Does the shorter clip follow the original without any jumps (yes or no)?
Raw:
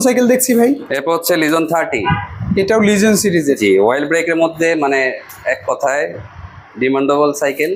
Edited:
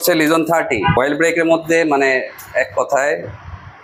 no